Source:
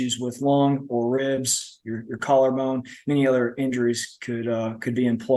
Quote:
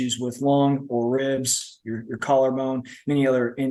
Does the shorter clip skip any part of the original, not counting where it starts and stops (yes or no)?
no